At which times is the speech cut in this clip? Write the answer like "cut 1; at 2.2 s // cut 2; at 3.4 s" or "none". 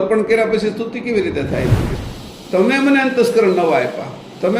cut 1; at 1.9 s